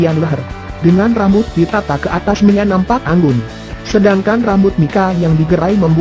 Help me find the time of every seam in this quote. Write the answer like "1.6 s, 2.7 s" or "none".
1.9 s